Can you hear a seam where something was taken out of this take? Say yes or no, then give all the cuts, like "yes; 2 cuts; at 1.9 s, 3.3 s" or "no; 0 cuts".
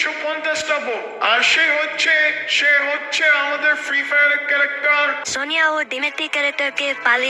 yes; 1 cut; at 5.3 s